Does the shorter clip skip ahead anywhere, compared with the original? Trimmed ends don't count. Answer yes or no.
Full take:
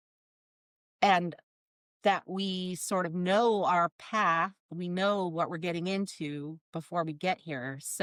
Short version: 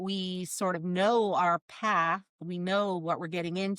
no